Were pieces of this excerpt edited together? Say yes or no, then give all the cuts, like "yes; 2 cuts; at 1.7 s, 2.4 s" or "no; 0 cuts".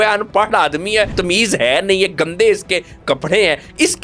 yes; 1 cut; at 1.1 s